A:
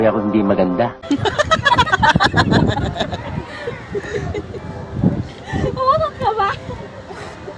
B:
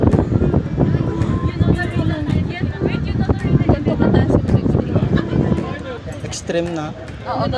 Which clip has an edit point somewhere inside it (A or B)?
A